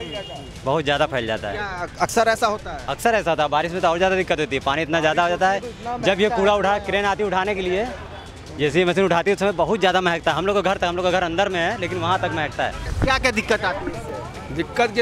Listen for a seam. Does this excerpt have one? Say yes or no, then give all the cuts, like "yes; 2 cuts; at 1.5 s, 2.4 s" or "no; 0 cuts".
yes; 1 cut; at 12.9 s